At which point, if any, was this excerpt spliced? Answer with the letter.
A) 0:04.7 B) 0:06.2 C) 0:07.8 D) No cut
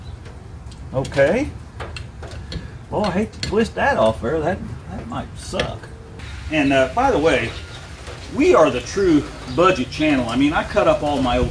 B